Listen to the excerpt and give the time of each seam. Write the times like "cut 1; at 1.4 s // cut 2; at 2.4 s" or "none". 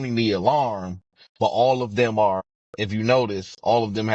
cut 1; at 2.4 s